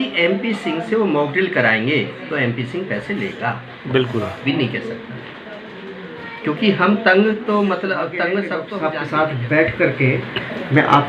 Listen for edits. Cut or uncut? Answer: cut